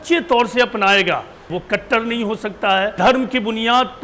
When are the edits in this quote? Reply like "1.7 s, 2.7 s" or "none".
1.5 s, 2.9 s